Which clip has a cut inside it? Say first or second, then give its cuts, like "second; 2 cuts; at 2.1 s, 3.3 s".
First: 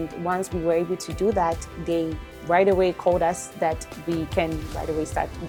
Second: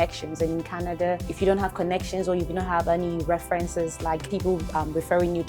second; 2 cuts; at 1.3 s, 4.2 s